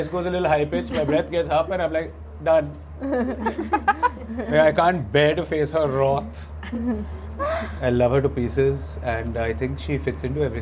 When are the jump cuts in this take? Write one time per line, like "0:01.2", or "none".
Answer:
none